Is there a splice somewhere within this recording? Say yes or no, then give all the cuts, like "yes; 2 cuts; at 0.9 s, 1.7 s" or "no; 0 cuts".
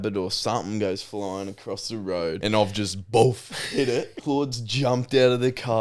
yes; 2 cuts; at 2.4 s, 4.1 s